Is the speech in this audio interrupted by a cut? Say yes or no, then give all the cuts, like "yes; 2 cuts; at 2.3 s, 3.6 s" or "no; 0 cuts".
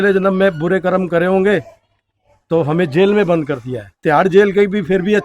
yes; 1 cut; at 4.0 s